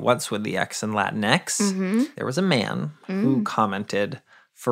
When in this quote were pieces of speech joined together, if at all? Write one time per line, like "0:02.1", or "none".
0:02.2

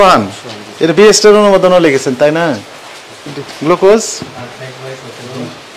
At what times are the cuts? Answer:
0:03.4

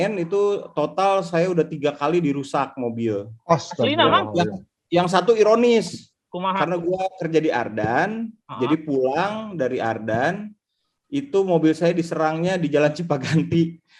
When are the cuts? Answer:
none

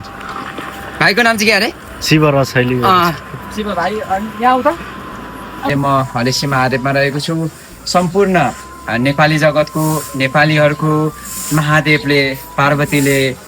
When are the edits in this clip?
0:05.7

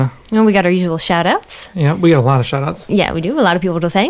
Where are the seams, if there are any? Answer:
none

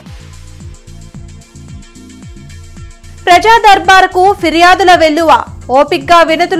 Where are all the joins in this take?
0:01.3

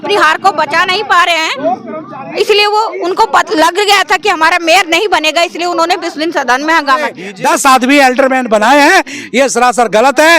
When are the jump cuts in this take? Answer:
0:07.2

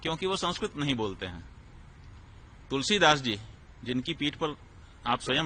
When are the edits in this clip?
none

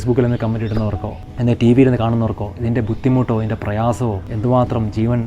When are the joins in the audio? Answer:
0:01.1
0:04.3

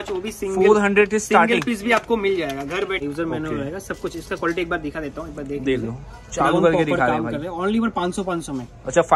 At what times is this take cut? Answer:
0:03.0

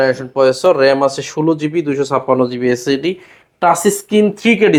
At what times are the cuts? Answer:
none

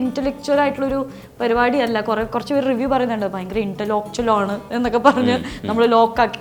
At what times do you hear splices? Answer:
none

